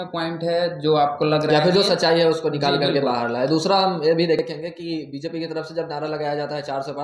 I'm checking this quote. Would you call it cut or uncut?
cut